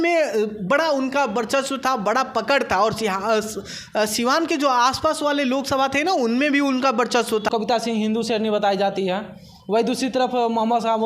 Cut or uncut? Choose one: cut